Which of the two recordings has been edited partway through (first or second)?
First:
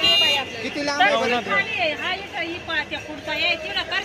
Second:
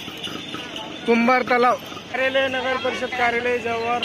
second